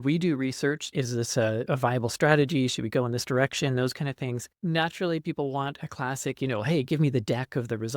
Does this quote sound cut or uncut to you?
cut